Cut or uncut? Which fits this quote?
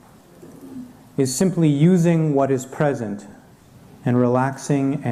uncut